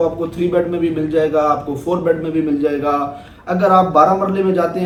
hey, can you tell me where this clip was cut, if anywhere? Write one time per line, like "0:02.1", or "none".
none